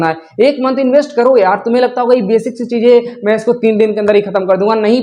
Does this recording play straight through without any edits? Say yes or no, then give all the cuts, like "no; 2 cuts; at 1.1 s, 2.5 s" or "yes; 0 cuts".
yes; 0 cuts